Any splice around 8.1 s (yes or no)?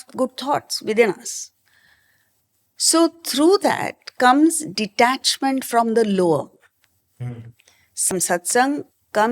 yes